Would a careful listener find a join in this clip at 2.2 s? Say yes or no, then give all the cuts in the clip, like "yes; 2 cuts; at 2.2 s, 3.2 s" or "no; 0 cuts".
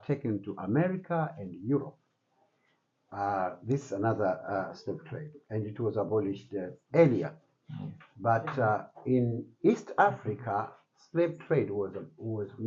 no; 0 cuts